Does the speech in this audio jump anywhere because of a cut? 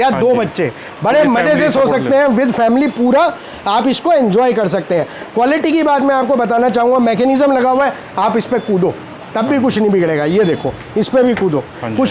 no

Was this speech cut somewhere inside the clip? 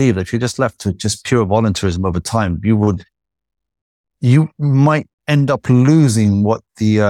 no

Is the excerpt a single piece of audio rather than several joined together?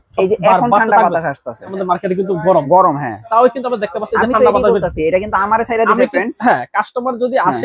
no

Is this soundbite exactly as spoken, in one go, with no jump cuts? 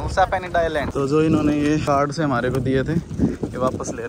no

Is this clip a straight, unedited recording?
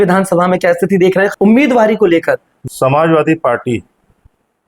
no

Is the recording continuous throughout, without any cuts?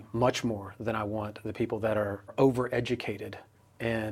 no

